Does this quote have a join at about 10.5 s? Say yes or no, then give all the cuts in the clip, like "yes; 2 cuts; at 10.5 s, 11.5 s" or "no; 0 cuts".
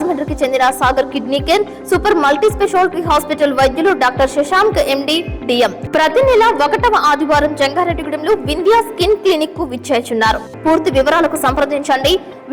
yes; 2 cuts; at 5.8 s, 10.5 s